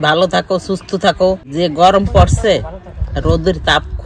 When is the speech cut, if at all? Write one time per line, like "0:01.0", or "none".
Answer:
0:01.5